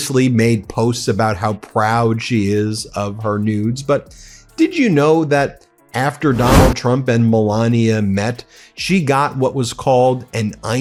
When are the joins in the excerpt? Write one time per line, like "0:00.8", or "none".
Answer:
none